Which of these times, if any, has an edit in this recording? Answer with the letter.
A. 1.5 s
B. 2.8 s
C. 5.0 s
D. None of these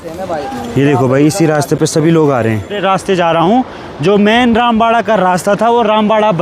B